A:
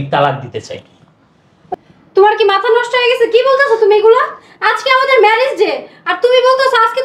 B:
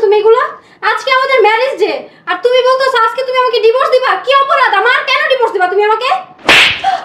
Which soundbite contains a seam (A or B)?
A